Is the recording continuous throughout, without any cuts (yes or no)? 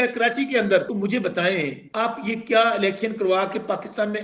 no